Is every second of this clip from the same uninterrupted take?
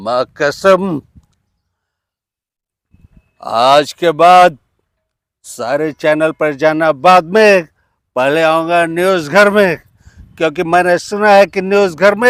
yes; 0 cuts

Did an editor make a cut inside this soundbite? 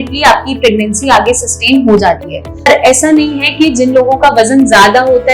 yes; 1 cut; at 2.7 s

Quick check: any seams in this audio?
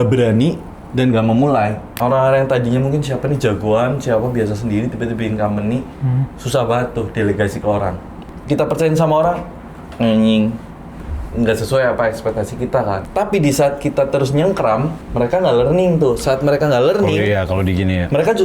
yes; 4 cuts; at 1.9 s, 8.3 s, 13.0 s, 15.0 s

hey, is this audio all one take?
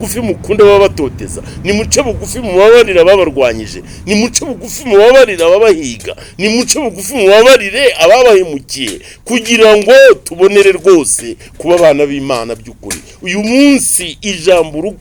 yes; 0 cuts

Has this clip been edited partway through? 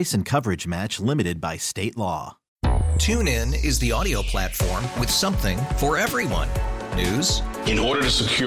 yes; 1 cut; at 2.4 s

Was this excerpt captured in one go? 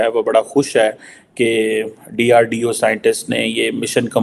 yes; 0 cuts

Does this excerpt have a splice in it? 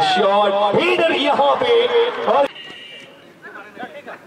yes; 1 cut; at 2.5 s

